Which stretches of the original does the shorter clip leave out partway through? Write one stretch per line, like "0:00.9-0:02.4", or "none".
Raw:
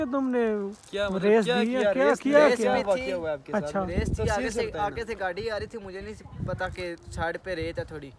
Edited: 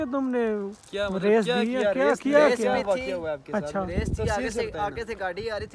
none